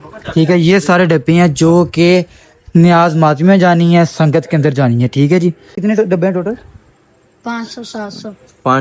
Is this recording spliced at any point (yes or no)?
yes